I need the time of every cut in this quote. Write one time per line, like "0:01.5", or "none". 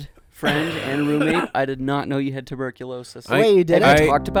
none